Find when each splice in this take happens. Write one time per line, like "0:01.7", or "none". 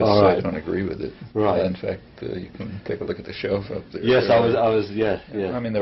none

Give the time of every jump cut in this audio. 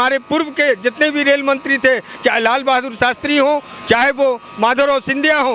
none

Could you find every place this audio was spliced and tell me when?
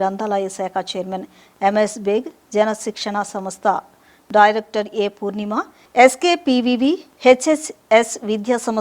0:05.8

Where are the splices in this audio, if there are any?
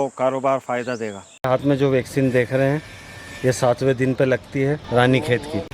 0:01.3
0:04.8

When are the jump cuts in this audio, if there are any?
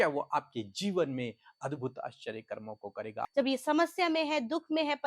0:03.2

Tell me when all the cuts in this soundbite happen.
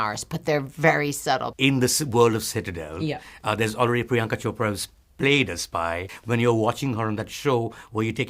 0:01.5
0:06.1

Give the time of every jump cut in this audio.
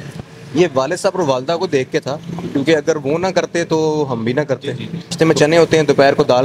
0:05.1

